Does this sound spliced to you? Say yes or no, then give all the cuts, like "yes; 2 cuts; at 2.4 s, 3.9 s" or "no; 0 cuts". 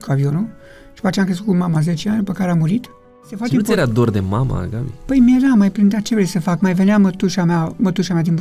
yes; 1 cut; at 3.4 s